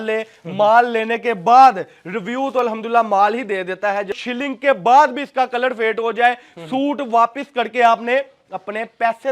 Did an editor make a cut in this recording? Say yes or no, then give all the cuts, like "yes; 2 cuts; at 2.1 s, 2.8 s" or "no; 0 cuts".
yes; 1 cut; at 4.2 s